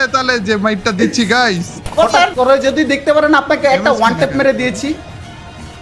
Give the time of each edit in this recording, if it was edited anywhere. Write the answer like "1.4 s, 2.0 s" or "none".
2.3 s

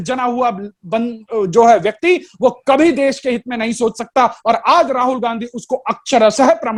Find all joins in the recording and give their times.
none

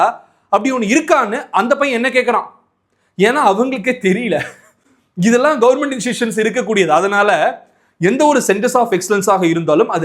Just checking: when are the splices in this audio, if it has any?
none

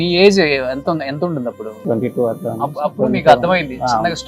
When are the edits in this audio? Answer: 1.8 s

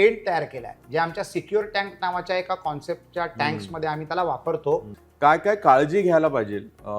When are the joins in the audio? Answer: 5.0 s

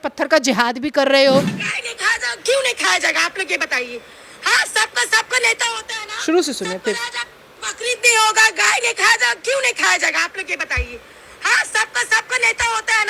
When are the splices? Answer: 1.6 s

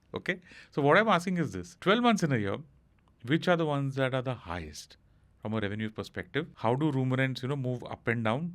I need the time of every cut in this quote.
1.6 s, 6.5 s

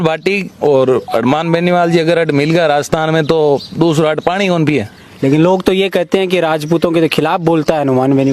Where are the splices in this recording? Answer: 5.0 s

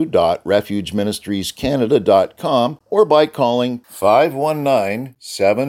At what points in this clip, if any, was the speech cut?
2.8 s

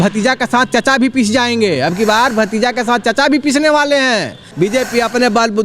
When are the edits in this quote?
4.4 s

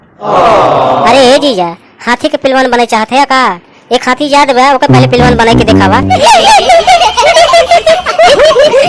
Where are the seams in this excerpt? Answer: 6.1 s

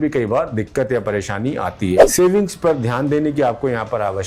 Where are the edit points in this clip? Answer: 2.1 s

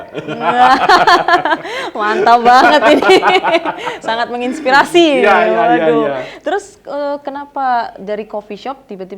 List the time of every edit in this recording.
none

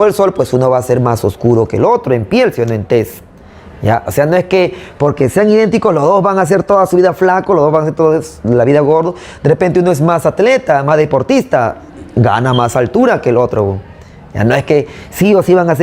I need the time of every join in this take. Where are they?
none

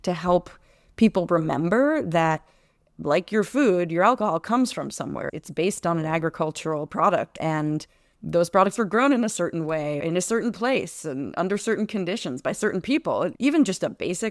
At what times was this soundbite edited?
7.3 s, 10.0 s, 13.4 s

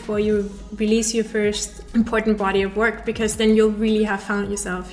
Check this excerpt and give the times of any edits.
1.7 s

